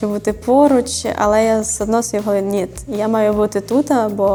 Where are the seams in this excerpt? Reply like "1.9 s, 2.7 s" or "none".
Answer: none